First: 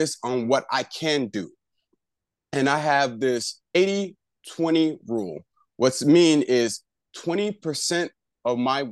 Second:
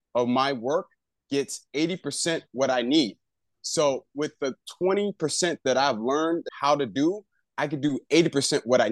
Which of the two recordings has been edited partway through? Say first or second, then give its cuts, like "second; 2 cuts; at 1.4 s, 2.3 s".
second; 1 cut; at 6.5 s